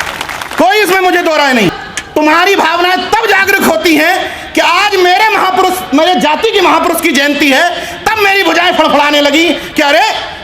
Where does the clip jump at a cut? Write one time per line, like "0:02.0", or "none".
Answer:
0:01.7